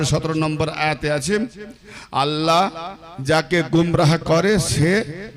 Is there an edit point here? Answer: no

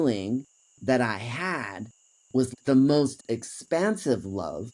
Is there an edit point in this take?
yes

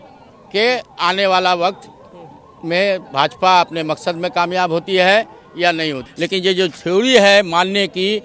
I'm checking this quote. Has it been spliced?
yes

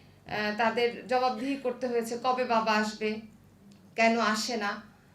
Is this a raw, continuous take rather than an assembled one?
yes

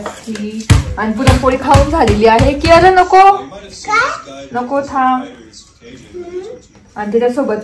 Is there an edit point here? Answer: no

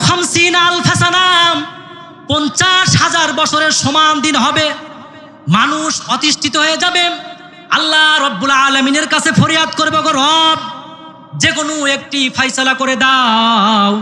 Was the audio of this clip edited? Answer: no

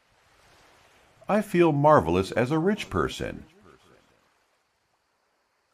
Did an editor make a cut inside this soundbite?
yes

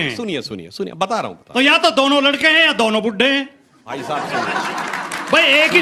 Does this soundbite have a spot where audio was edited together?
no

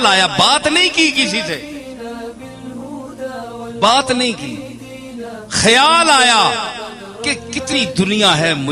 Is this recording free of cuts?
yes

